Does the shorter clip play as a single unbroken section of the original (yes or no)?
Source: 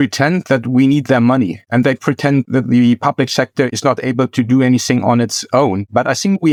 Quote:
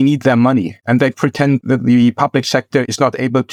yes